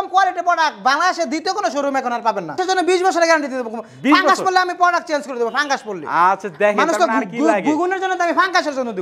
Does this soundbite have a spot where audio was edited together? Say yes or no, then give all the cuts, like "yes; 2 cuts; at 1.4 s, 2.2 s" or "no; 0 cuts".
no; 0 cuts